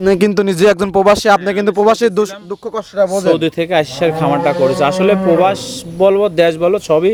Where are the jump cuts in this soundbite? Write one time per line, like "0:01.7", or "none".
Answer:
none